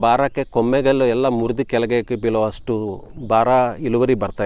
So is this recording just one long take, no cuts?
yes; 0 cuts

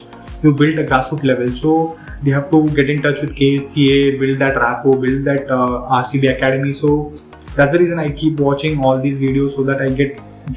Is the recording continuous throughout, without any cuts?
yes; 0 cuts

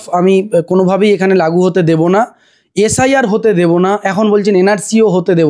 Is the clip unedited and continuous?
yes; 0 cuts

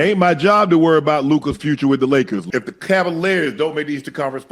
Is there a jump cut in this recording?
yes; 1 cut; at 2.5 s

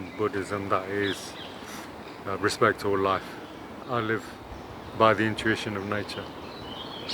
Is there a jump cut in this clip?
yes; 1 cut; at 3.9 s

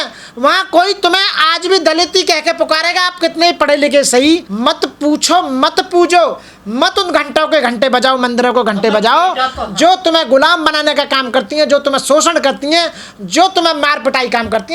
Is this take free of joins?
no; 1 cut; at 4.5 s

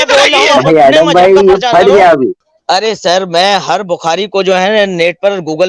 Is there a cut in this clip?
yes; 1 cut; at 2.5 s

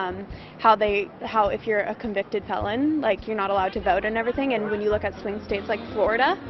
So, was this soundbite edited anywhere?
yes; 1 cut; at 3.1 s

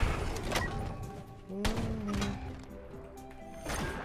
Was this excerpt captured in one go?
yes; 0 cuts

